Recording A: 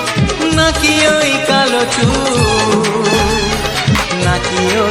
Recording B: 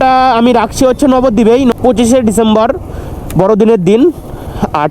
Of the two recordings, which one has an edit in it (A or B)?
B